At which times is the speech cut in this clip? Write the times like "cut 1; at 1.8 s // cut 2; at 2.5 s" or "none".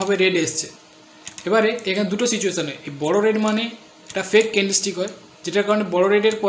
none

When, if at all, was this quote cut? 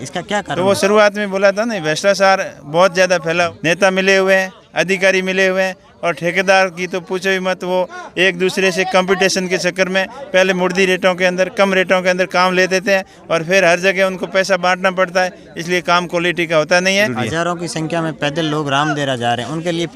cut 1; at 3.5 s // cut 2; at 17.1 s

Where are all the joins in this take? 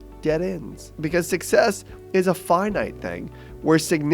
cut 1; at 0.9 s

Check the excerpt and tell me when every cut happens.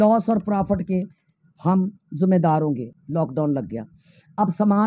cut 1; at 2.9 s

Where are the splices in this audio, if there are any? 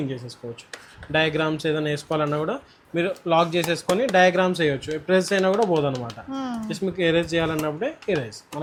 none

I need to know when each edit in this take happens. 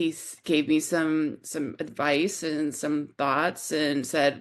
none

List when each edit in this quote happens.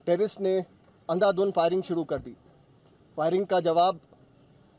none

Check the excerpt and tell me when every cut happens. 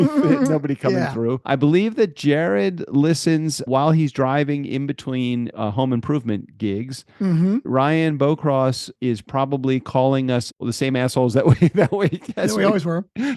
cut 1; at 1.4 s // cut 2; at 3.6 s // cut 3; at 5.5 s // cut 4; at 7.7 s // cut 5; at 8.9 s // cut 6; at 10.6 s

